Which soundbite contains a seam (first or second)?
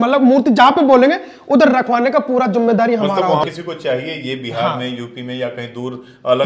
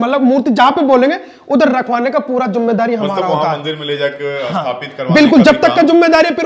first